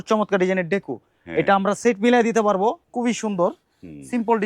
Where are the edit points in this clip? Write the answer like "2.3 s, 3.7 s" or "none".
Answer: 2.8 s